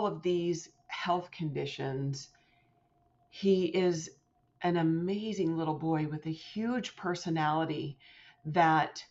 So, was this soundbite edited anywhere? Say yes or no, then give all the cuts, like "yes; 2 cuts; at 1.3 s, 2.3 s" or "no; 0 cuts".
no; 0 cuts